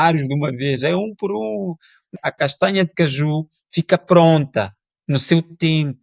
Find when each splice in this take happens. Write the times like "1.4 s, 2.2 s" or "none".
2.1 s